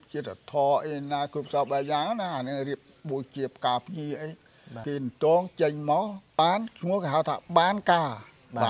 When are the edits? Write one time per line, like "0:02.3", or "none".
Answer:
0:04.8
0:06.4